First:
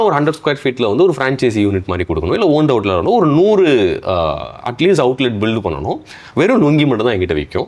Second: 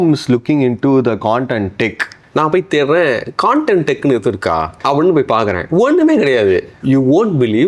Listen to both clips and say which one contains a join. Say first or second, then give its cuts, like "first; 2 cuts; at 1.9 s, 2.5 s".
second; 3 cuts; at 2.1 s, 4.7 s, 6.7 s